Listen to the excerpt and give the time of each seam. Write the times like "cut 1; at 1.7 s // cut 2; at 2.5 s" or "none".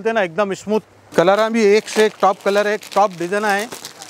cut 1; at 1.0 s